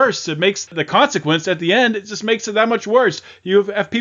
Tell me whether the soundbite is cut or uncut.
uncut